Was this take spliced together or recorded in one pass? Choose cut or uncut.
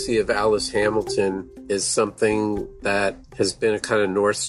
cut